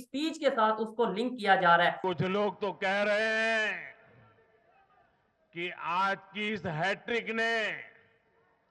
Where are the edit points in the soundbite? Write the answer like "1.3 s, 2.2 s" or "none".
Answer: 2.0 s